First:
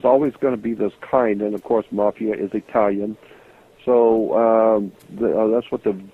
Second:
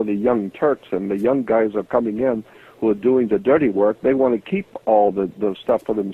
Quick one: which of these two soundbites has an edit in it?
first; 1 cut; at 1.1 s

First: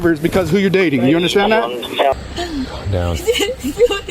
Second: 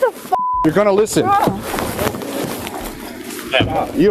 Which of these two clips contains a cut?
first; 1 cut; at 2.1 s

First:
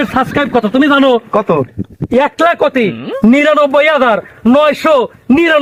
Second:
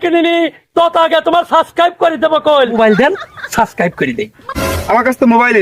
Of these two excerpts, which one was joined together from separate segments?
second; 2 cuts; at 2.7 s, 4.4 s

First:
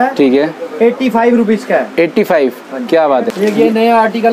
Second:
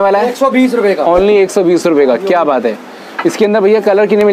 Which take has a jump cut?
first; 1 cut; at 3.3 s

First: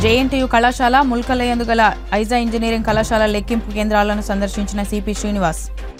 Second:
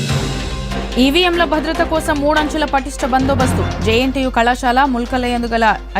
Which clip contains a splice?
second; 1 cut; at 0.9 s

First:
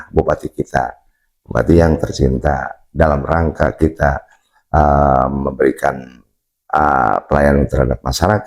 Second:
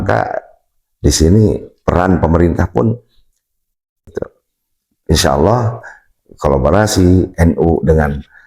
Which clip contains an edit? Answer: second; 1 cut; at 4.1 s

